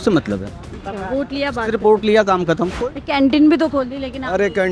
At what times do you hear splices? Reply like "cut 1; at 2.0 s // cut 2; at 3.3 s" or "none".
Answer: cut 1; at 2.7 s